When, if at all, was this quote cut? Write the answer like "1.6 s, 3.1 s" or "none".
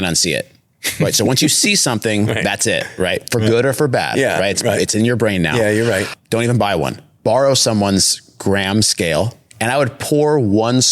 6.1 s, 9.4 s